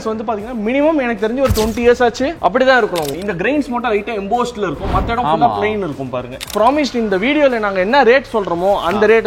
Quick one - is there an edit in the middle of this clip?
yes; 2 cuts; at 3.1 s, 6.5 s

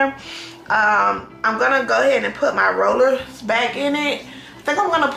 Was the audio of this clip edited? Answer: no; 0 cuts

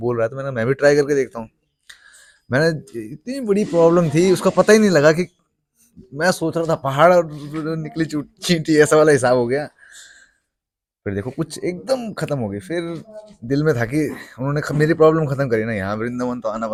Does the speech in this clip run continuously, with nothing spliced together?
yes; 0 cuts

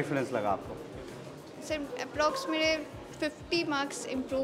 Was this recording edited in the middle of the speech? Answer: no; 0 cuts

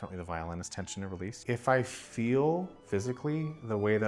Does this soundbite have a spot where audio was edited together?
yes; 2 cuts; at 1.3 s, 2.7 s

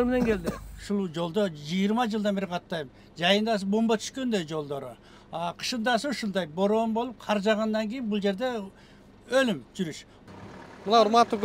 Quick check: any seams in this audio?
yes; 2 cuts; at 0.8 s, 10.1 s

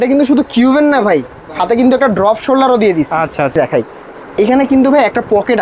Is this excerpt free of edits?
no; 1 cut; at 3.5 s

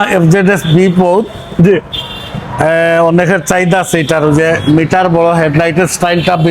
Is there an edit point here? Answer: no; 0 cuts

